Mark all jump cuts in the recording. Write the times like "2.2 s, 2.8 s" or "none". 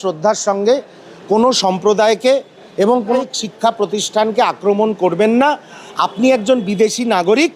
3.2 s